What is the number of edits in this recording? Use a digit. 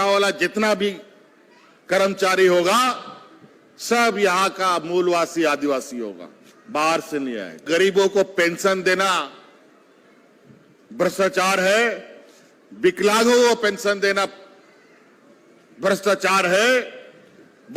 1